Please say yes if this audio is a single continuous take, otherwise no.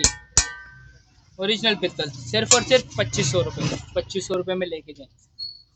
yes